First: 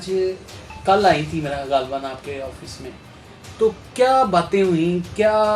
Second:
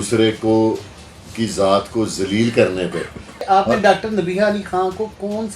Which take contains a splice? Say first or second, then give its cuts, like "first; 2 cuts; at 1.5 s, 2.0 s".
second; 1 cut; at 3.4 s